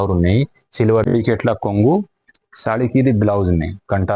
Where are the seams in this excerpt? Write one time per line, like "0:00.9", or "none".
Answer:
0:01.1